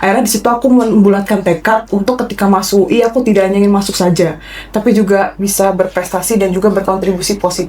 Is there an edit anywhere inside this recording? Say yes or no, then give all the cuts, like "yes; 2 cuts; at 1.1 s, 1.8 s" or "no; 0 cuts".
no; 0 cuts